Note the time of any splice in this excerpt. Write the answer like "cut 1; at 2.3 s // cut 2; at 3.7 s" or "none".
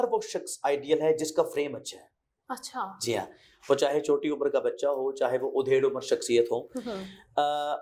none

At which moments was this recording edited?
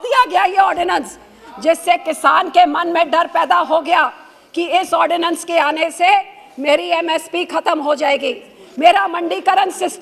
none

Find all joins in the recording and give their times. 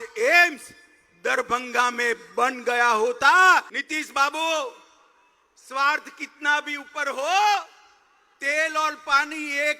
cut 1; at 3.8 s

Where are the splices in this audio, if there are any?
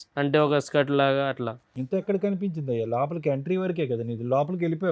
none

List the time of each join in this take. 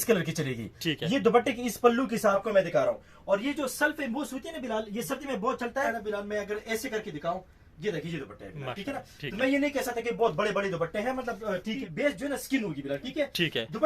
cut 1; at 2.4 s // cut 2; at 5.9 s // cut 3; at 11.8 s

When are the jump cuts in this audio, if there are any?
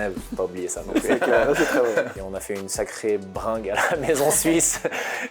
cut 1; at 2.1 s

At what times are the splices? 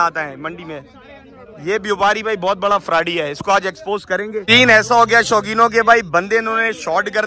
cut 1; at 4.4 s

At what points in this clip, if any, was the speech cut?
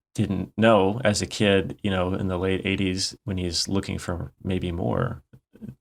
none

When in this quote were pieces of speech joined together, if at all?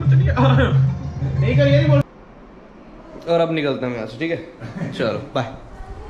cut 1; at 2.0 s

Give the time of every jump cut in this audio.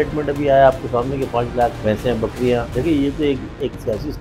cut 1; at 1.8 s // cut 2; at 2.7 s

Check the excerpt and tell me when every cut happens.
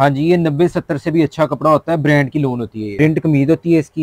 cut 1; at 2.8 s

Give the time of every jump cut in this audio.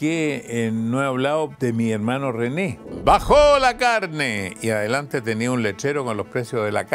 cut 1; at 1.5 s // cut 2; at 2.9 s

